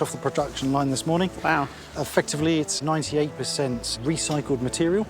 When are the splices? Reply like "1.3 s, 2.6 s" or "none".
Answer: 2.8 s, 3.9 s